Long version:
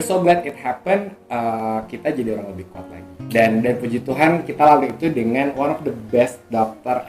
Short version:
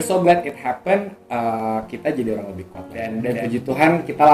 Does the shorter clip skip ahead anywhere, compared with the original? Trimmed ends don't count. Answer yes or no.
yes